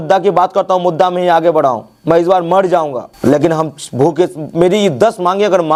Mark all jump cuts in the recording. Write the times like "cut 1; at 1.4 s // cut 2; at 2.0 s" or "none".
none